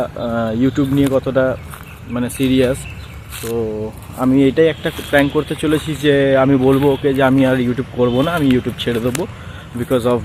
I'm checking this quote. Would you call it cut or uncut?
uncut